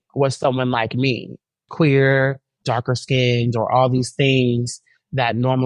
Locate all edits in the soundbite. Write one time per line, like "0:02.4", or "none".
0:01.3
0:02.5